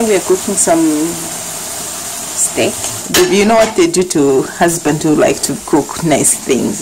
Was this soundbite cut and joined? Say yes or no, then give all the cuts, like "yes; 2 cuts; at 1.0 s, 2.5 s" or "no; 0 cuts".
yes; 1 cut; at 3.2 s